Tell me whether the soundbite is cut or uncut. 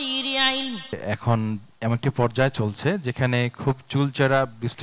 cut